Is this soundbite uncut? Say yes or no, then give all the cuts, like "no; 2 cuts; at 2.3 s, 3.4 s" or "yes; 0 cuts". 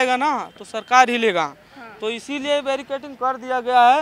yes; 0 cuts